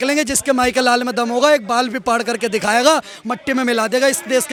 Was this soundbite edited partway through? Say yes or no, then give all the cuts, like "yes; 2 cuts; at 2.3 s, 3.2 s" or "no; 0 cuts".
no; 0 cuts